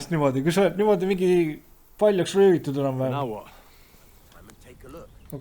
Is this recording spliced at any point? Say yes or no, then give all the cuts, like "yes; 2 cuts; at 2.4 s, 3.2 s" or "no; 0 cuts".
yes; 1 cut; at 4.2 s